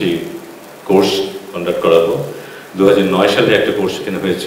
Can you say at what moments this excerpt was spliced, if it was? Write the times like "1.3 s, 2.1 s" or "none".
none